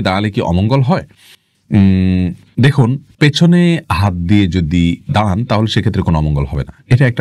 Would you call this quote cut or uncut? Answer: uncut